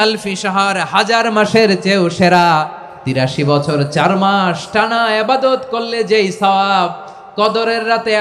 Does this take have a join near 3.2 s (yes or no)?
yes